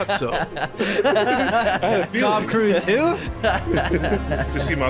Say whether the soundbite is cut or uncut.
uncut